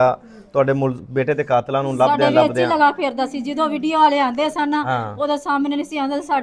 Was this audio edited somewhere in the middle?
no; 0 cuts

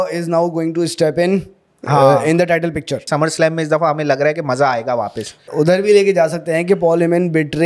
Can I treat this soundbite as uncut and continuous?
no; 2 cuts; at 3.0 s, 5.5 s

